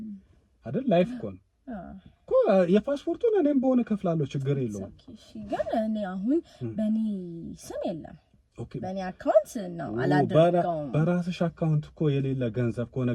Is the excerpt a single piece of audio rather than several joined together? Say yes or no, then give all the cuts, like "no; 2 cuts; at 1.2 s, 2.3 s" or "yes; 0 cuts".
yes; 0 cuts